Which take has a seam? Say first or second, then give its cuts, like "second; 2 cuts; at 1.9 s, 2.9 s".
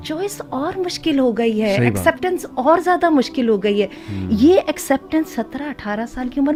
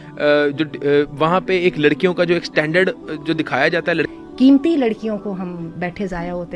second; 1 cut; at 4.2 s